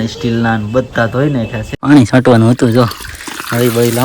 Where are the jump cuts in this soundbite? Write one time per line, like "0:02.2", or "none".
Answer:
0:01.7